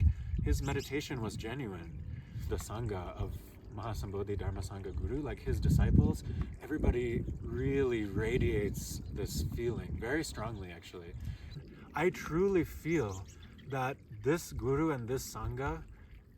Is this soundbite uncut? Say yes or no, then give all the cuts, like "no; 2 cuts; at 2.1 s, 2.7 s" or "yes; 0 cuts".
no; 2 cuts; at 2.5 s, 11.6 s